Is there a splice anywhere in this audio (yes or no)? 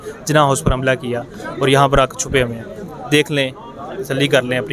no